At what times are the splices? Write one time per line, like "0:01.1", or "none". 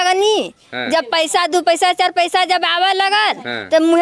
none